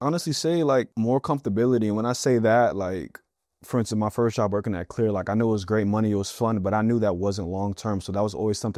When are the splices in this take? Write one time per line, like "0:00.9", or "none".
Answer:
0:00.9